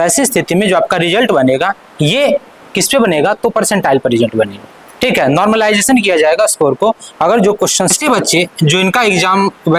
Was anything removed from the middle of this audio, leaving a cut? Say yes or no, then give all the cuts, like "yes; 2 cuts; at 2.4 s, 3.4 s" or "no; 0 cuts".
yes; 1 cut; at 8.0 s